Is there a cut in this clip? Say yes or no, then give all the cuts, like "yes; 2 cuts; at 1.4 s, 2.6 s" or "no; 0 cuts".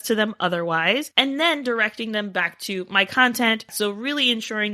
yes; 1 cut; at 3.7 s